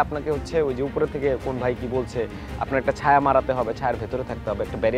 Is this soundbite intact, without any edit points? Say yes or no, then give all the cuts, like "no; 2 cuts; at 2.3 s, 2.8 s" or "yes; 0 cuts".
yes; 0 cuts